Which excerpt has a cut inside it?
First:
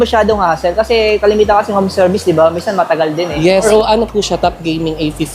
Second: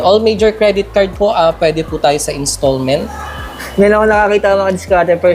first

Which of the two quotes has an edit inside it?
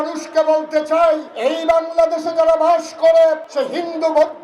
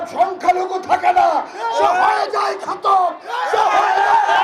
first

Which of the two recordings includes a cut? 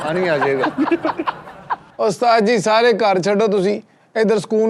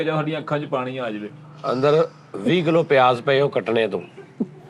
first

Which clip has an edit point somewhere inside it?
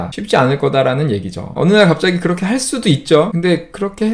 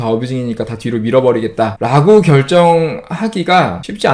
first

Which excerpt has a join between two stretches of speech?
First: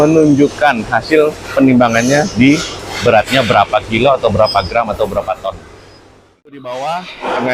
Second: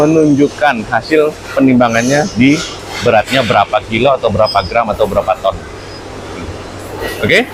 first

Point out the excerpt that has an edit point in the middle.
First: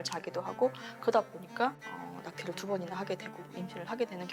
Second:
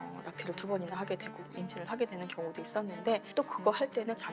second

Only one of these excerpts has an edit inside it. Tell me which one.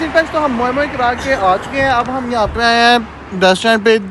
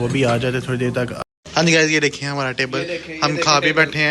second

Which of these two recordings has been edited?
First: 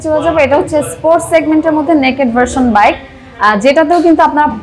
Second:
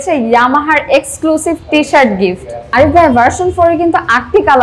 second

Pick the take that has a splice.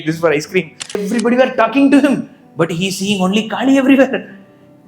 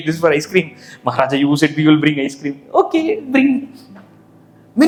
first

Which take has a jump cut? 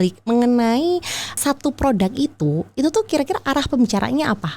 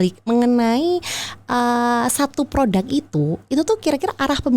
first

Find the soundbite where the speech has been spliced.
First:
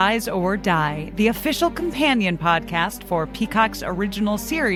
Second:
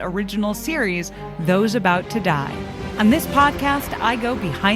second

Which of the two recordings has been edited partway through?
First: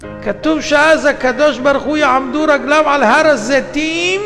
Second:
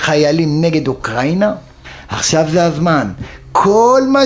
second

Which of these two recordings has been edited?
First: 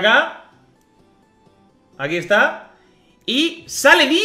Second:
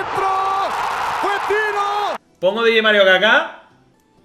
second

